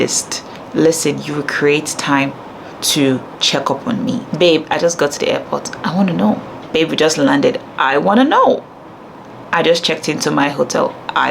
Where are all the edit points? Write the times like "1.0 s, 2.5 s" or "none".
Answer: 4.3 s, 6.5 s